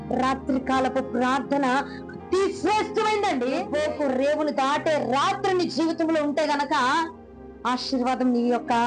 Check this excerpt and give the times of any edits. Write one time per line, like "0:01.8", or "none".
0:03.7

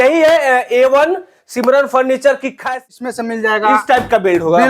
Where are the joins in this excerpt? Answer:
0:02.9

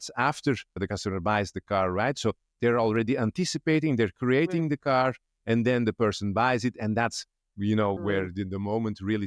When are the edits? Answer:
0:00.8
0:08.0

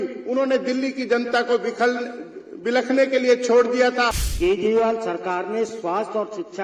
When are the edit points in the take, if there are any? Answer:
0:04.2

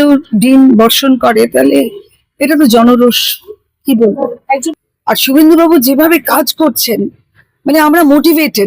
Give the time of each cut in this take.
0:04.8

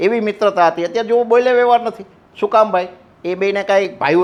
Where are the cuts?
none

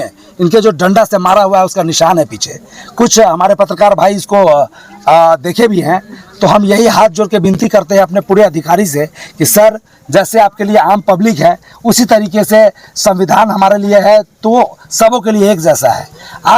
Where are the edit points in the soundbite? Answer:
none

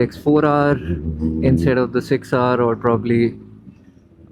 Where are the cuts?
none

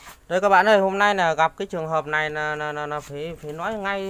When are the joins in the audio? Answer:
none

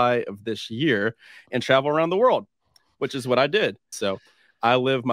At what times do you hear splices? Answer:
0:03.9

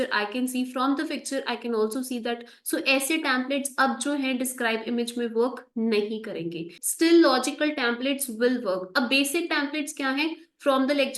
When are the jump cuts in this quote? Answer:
0:06.8

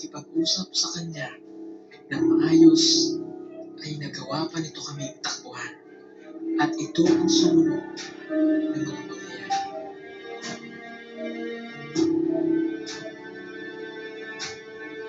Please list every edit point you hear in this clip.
none

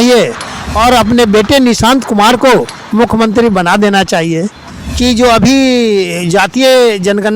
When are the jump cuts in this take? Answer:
0:04.6

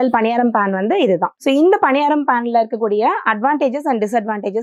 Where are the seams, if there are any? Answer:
none

